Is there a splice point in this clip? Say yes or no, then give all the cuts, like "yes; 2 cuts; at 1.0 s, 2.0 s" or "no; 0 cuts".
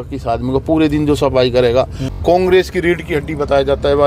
yes; 1 cut; at 2.2 s